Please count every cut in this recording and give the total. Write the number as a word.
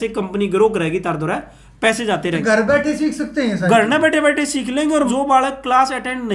two